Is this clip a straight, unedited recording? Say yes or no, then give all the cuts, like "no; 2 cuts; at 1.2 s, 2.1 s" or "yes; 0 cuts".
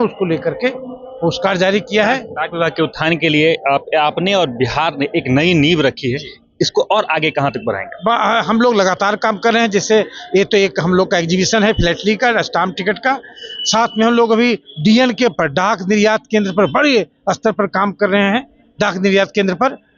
yes; 0 cuts